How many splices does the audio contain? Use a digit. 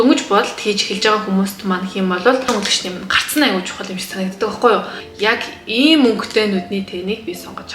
2